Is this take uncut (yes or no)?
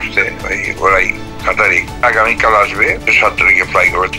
no